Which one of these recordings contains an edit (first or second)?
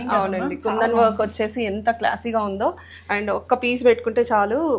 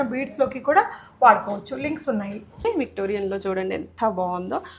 second